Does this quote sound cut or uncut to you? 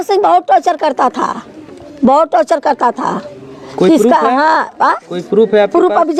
uncut